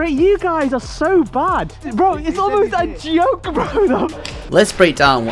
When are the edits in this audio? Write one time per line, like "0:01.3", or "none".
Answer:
0:01.8
0:04.1